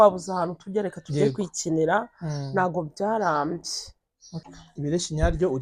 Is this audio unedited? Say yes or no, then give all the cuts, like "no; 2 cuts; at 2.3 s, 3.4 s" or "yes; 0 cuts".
no; 1 cut; at 4.4 s